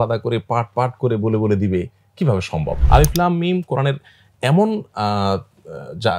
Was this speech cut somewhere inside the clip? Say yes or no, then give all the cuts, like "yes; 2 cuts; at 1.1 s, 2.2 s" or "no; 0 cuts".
yes; 1 cut; at 2.7 s